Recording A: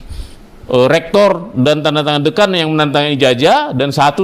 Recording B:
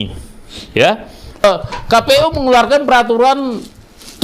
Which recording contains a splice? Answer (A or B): B